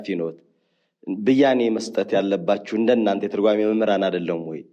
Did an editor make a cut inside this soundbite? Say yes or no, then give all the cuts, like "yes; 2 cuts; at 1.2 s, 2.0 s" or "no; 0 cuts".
no; 0 cuts